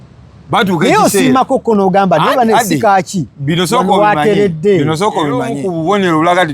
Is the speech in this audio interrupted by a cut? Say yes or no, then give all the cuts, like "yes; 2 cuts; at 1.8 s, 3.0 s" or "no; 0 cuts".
yes; 1 cut; at 5.5 s